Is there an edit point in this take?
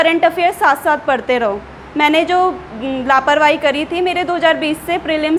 no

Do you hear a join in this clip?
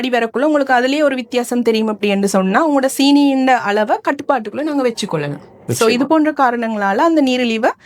no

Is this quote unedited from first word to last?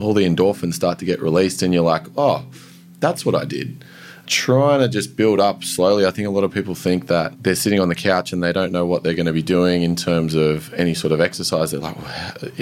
no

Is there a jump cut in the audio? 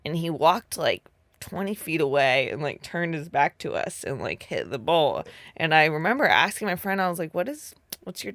no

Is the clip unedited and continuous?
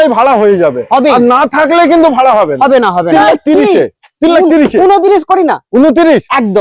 no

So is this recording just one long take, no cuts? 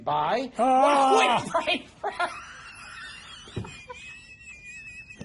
yes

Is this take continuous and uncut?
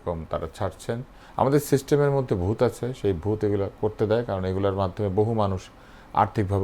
no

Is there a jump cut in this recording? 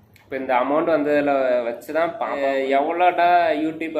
yes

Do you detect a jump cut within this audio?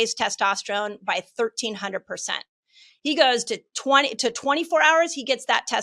yes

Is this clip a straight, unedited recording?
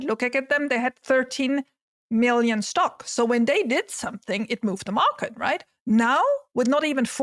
yes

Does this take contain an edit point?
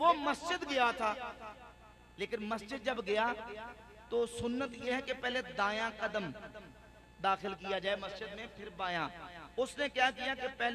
no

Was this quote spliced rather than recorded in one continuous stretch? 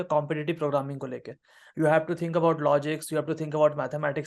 no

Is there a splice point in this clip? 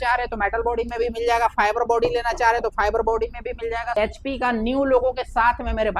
yes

